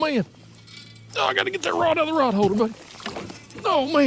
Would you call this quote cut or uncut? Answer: uncut